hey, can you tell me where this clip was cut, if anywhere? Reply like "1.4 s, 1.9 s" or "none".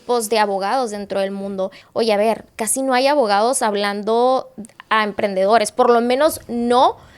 1.8 s